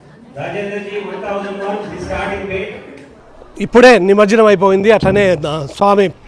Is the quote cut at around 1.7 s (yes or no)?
no